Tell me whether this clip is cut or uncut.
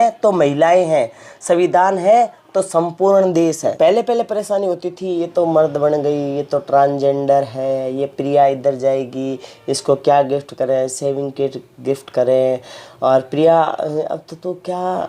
cut